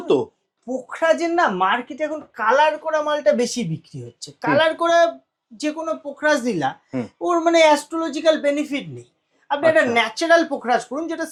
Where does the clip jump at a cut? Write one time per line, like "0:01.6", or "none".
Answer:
none